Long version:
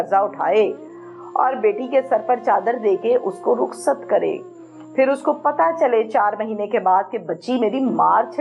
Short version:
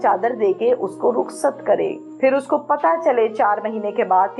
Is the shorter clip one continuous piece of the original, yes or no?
no